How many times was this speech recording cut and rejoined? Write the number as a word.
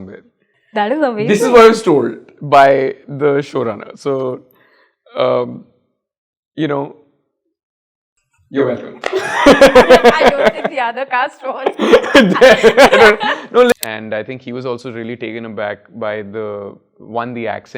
one